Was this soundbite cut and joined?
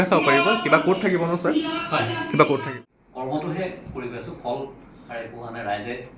yes; 1 cut; at 2.7 s

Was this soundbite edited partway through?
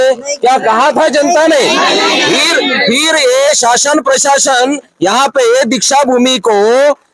no; 0 cuts

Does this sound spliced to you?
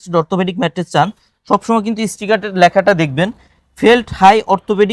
no; 0 cuts

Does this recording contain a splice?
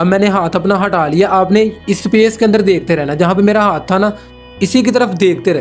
no; 0 cuts

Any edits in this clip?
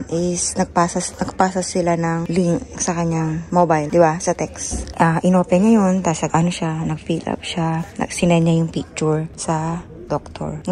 no; 0 cuts

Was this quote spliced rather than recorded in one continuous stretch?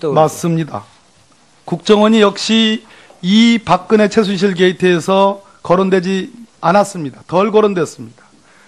yes; 1 cut; at 5.1 s

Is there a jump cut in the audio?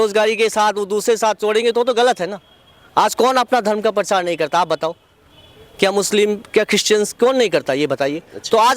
no; 0 cuts

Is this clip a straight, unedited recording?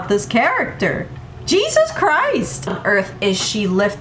no; 1 cut; at 2.6 s

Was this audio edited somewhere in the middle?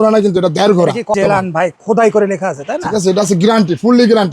yes; 1 cut; at 1.2 s

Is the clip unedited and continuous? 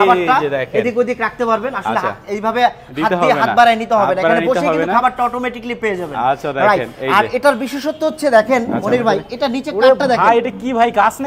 yes; 0 cuts

